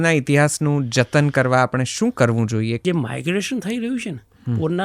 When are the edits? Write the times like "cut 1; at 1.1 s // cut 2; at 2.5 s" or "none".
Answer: cut 1; at 2.8 s